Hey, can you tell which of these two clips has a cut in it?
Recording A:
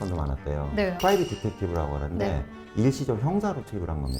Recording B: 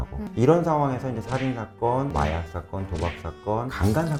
A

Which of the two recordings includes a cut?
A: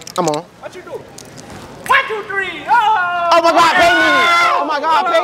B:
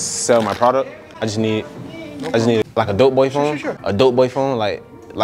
B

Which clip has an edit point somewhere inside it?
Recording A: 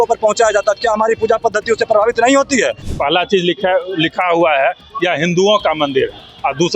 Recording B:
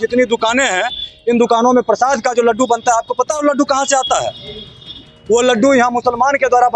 A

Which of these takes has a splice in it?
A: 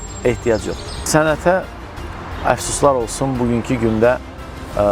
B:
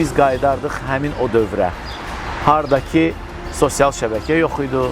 A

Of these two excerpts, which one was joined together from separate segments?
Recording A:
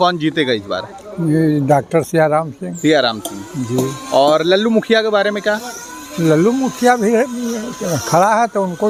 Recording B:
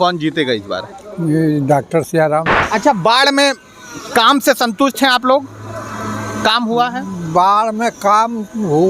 B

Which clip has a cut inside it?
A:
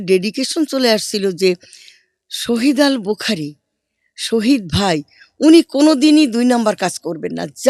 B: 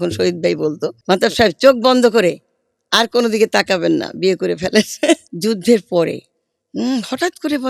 B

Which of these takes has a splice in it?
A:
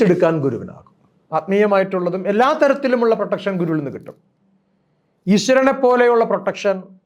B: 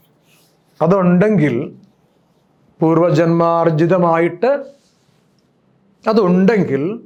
A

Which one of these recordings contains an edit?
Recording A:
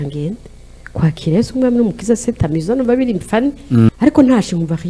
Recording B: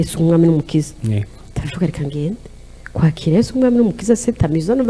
A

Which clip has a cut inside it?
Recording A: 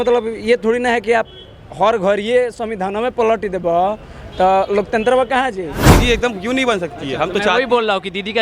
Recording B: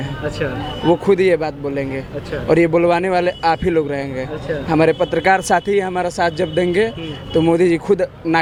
A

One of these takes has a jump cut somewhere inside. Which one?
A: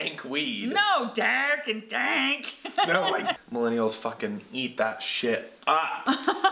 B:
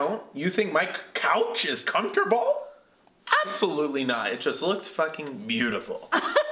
A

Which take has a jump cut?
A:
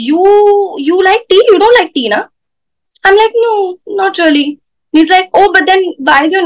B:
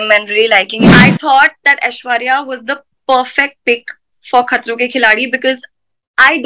B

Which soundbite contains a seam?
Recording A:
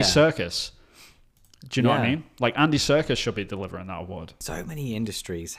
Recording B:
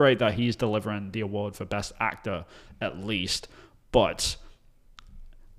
A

